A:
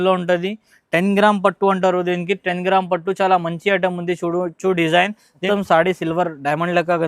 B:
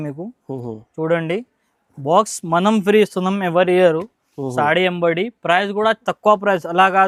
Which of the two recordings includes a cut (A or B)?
A